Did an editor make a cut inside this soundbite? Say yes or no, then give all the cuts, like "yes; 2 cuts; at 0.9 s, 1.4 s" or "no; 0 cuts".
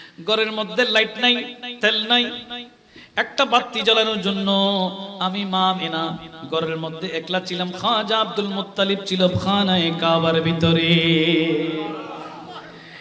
no; 0 cuts